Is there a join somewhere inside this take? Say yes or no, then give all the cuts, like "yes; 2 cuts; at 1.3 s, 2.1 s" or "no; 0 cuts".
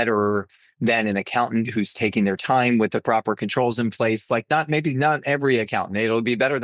no; 0 cuts